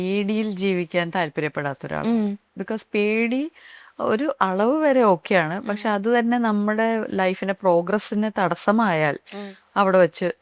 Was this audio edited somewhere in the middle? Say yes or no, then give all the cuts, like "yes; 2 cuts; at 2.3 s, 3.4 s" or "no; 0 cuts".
no; 0 cuts